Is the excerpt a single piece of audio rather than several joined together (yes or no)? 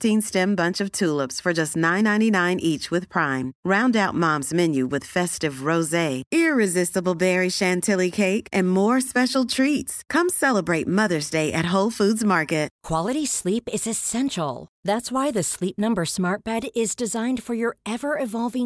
no